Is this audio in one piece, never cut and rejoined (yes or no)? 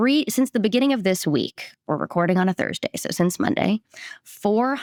yes